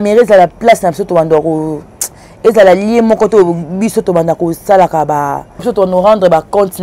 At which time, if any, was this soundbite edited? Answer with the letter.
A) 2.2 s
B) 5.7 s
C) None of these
B